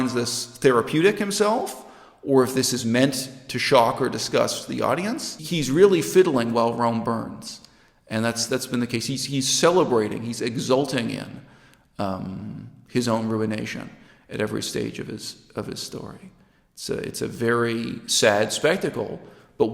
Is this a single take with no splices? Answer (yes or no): no